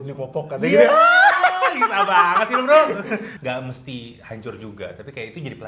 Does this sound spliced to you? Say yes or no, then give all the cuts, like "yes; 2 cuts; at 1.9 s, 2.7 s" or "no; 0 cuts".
yes; 1 cut; at 3.3 s